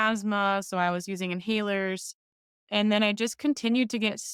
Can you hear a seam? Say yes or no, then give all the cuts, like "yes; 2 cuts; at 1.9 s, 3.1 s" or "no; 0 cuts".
yes; 1 cut; at 2.6 s